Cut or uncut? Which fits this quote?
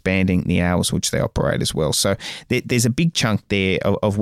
uncut